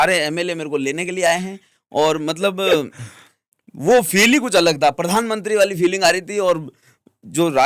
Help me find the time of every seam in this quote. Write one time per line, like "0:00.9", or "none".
none